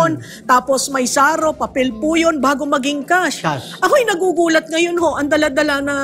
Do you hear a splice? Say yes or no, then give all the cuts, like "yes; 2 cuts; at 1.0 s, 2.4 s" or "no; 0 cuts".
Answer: no; 0 cuts